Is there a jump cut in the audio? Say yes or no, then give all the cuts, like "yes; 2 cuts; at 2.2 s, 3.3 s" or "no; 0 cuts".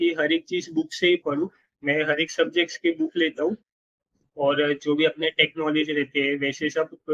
no; 0 cuts